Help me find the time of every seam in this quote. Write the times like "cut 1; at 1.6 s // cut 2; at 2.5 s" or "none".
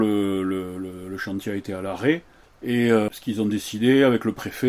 cut 1; at 3.1 s